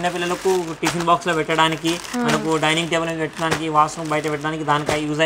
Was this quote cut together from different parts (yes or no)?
no